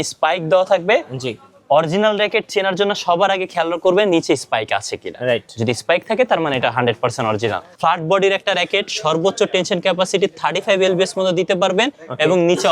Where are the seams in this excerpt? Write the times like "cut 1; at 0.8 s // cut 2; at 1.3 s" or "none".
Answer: cut 1; at 7.7 s